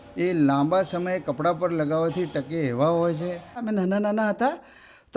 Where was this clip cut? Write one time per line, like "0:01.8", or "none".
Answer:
0:03.6